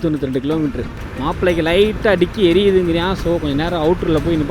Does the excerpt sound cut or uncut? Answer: cut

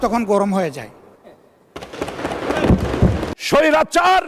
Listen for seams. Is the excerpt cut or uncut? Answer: cut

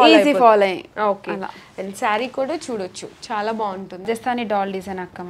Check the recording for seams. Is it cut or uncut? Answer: cut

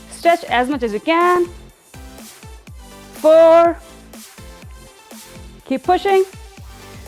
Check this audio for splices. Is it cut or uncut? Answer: cut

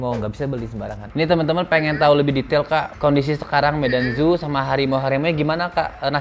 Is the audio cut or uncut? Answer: cut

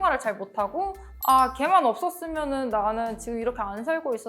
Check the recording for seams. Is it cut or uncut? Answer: cut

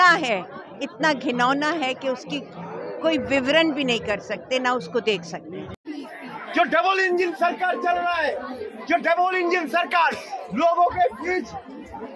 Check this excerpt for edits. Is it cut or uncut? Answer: uncut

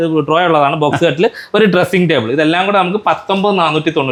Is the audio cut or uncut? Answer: uncut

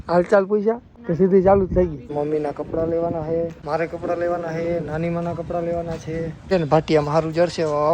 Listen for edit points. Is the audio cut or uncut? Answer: cut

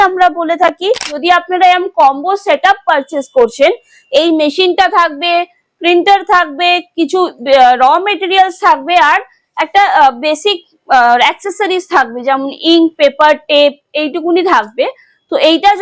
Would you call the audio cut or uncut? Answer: cut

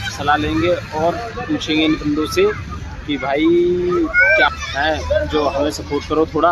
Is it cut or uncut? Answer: cut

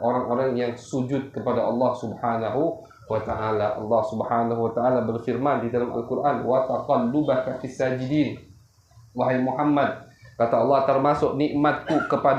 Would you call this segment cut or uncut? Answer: uncut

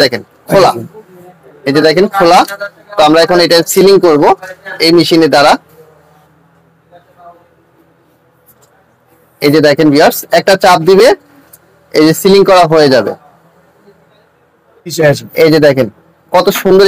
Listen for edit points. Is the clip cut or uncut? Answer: cut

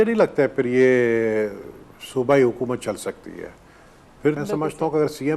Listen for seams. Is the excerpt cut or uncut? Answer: cut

